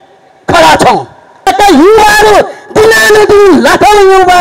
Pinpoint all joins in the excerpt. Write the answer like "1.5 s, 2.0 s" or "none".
1.5 s